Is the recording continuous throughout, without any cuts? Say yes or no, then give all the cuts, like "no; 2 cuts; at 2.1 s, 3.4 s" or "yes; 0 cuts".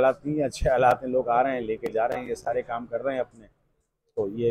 yes; 0 cuts